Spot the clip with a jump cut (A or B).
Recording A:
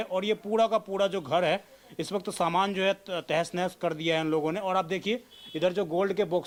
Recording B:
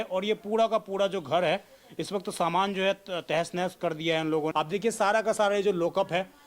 B